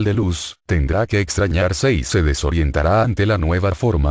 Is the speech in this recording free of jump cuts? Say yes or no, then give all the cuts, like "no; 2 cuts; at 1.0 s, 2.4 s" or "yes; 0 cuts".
no; 1 cut; at 2.2 s